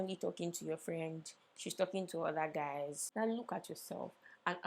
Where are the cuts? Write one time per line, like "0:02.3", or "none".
0:03.0